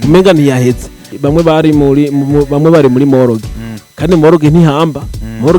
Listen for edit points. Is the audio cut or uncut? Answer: cut